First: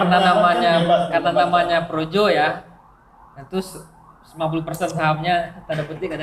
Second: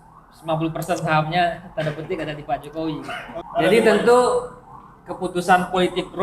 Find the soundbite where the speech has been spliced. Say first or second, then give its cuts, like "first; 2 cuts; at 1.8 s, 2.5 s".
second; 1 cut; at 3.4 s